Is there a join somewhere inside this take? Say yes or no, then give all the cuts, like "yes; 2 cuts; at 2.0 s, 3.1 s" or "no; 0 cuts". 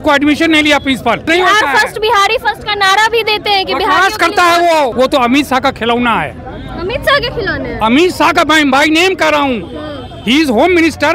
yes; 2 cuts; at 1.3 s, 4.9 s